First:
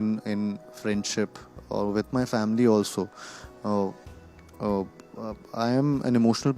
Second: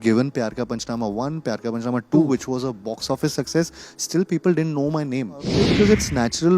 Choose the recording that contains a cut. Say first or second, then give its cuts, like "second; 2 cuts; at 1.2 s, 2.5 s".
second; 1 cut; at 5.6 s